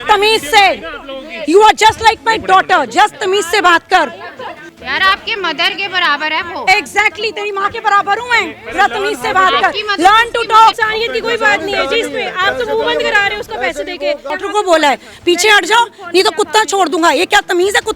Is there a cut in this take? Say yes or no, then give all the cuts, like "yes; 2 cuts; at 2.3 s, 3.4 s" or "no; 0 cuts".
yes; 3 cuts; at 4.7 s, 10.8 s, 14.3 s